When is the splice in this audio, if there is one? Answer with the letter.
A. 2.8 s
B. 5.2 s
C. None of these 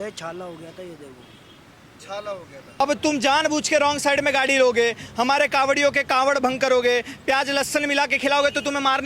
A